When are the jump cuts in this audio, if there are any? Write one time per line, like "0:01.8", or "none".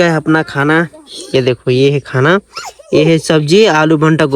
none